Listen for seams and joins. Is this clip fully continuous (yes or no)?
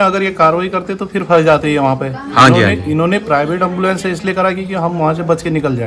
yes